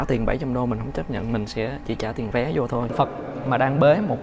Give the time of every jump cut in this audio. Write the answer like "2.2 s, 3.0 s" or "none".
2.9 s